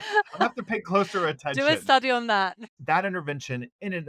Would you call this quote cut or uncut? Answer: cut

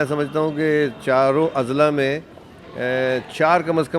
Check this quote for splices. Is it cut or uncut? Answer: uncut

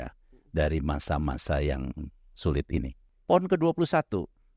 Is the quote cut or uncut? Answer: cut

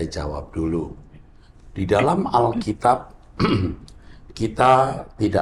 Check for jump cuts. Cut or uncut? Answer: uncut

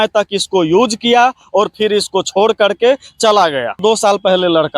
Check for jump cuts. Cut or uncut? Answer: cut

